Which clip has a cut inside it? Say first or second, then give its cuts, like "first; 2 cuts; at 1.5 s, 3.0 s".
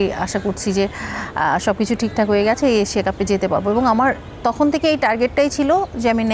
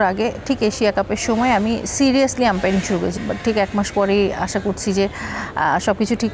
second; 1 cut; at 3.2 s